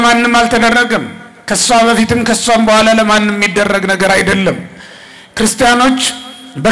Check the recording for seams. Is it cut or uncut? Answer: uncut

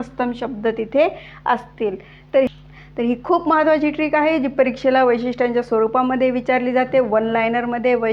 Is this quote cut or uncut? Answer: cut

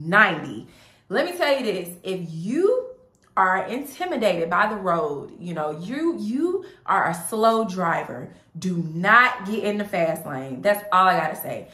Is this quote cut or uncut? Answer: uncut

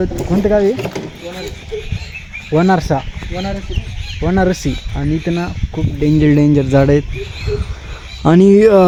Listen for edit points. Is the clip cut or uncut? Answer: uncut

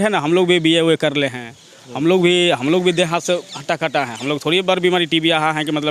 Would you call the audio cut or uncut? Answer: uncut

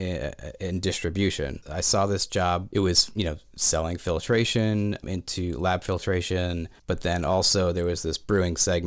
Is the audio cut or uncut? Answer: cut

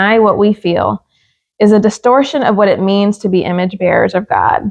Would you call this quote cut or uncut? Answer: uncut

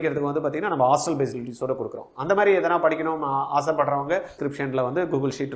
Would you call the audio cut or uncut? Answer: cut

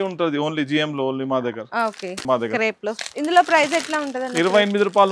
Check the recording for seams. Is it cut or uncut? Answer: cut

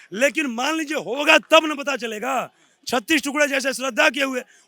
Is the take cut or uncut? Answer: uncut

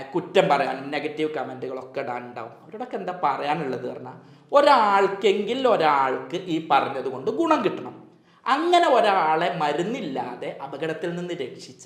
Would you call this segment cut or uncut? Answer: uncut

